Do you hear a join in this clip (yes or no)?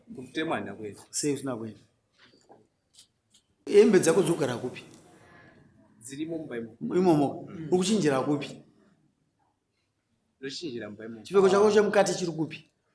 yes